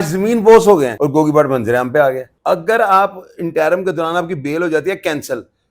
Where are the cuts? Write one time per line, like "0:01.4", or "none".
0:00.9
0:02.3